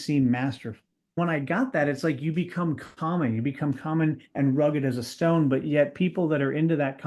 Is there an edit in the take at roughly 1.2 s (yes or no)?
yes